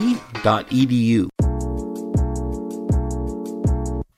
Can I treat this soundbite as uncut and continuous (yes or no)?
no